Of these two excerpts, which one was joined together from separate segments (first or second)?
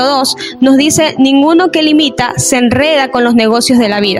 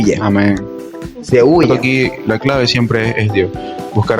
second